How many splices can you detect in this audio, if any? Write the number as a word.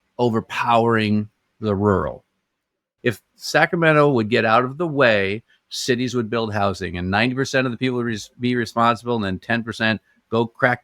one